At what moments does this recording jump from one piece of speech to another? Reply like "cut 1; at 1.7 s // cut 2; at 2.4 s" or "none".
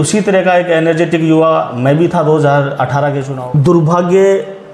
cut 1; at 3.3 s